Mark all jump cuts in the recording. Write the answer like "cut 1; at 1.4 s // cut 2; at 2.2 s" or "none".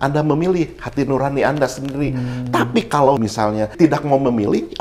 cut 1; at 3.3 s